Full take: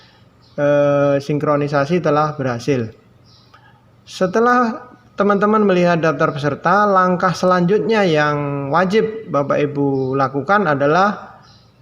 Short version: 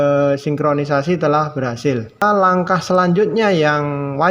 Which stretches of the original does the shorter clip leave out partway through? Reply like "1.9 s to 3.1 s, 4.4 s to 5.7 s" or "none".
3.0 s to 6.7 s